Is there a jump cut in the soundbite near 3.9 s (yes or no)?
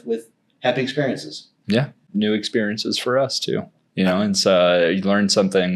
no